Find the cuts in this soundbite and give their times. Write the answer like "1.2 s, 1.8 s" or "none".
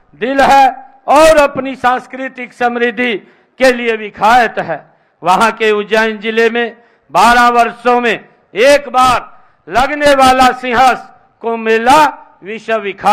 none